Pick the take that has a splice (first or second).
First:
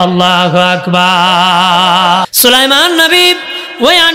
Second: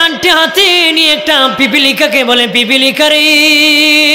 first